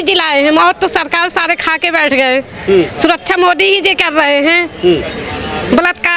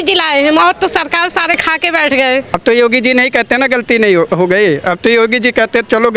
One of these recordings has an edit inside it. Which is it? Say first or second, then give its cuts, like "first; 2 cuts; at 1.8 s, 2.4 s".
second; 1 cut; at 2.6 s